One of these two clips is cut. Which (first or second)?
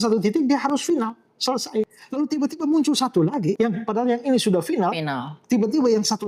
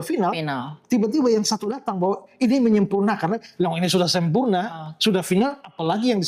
first